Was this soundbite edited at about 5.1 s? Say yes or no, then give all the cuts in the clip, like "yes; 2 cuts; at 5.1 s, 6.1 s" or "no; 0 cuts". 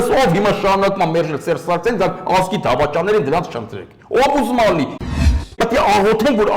yes; 1 cut; at 5.1 s